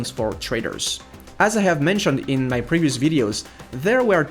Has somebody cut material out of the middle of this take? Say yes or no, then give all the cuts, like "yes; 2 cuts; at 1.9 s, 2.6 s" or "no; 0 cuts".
no; 0 cuts